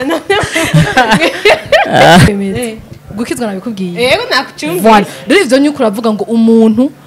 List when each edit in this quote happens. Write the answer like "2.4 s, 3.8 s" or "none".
2.3 s

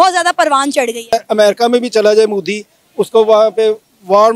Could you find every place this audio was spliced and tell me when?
1.1 s

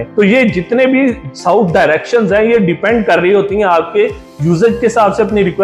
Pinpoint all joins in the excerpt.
none

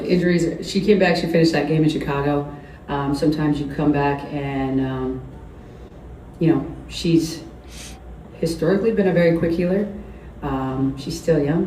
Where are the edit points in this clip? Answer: none

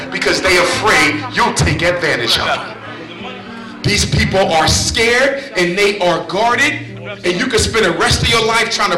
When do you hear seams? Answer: none

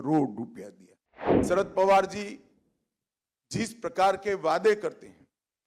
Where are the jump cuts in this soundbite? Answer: 1.4 s

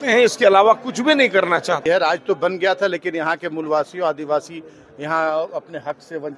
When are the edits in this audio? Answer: 1.8 s

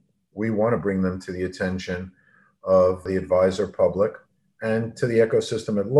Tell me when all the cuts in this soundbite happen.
3.1 s

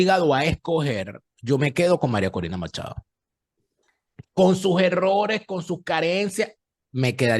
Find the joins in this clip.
none

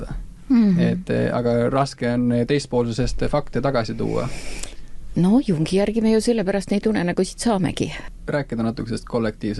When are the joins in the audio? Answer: 8.0 s

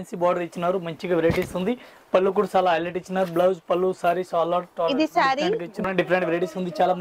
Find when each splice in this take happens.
5.7 s

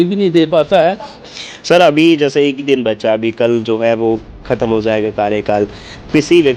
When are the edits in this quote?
1.2 s

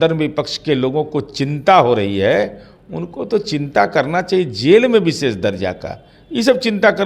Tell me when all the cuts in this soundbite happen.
none

